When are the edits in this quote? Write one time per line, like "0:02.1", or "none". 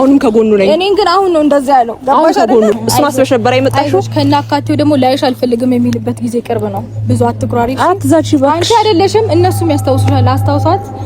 0:02.7